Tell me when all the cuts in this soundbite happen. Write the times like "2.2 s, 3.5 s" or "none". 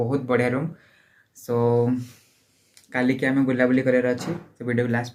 none